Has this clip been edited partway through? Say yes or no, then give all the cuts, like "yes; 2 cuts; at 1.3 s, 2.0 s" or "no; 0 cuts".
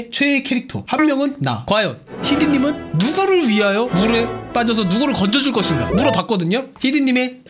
no; 0 cuts